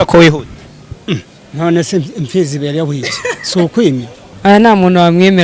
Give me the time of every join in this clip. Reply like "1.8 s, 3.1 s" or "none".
4.2 s